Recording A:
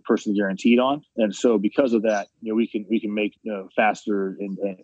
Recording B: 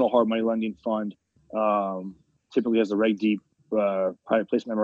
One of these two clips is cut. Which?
A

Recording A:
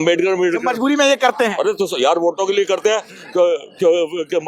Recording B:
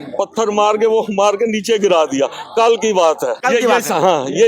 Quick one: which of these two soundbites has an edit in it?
B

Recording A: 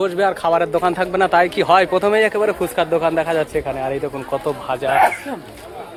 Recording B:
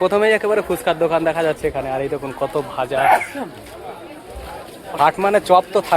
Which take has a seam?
B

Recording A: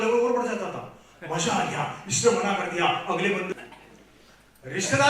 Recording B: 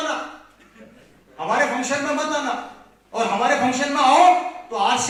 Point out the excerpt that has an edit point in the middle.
A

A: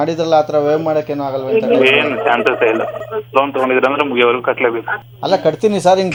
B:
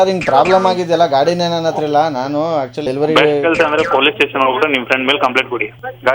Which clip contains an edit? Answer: B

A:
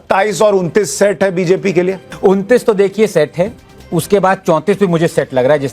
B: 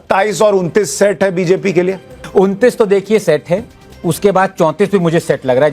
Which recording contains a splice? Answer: A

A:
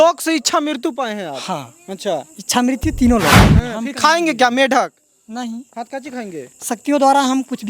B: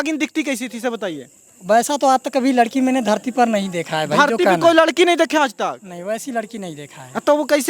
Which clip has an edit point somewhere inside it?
A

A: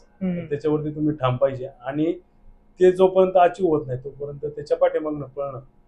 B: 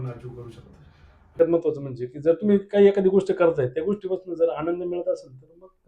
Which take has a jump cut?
B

